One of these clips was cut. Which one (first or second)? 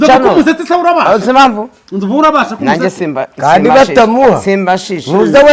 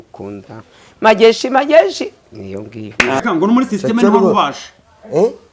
second